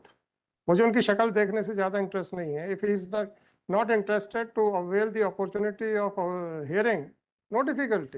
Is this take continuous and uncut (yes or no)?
yes